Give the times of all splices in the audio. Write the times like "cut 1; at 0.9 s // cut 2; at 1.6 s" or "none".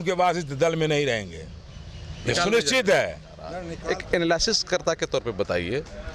cut 1; at 3.7 s